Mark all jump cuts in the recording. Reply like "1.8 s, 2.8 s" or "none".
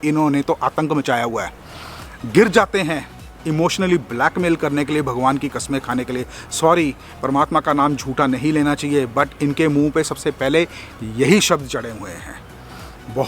none